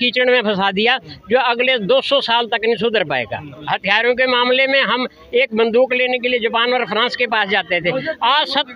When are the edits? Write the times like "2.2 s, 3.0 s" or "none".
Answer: 3.5 s